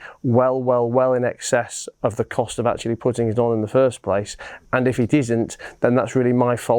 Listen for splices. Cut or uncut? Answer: cut